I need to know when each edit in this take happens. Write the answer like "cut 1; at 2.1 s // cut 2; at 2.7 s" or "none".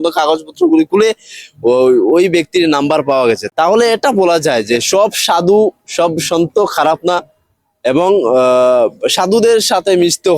cut 1; at 3.5 s